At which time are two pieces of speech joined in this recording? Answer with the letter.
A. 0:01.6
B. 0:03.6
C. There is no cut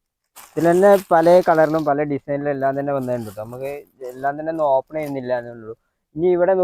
C